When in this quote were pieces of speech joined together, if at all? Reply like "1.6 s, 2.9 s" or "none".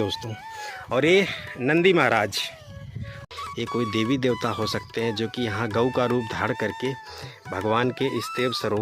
3.1 s